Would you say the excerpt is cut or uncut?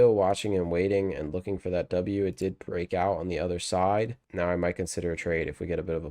cut